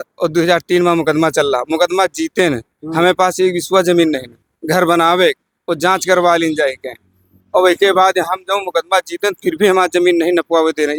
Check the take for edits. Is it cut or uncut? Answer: uncut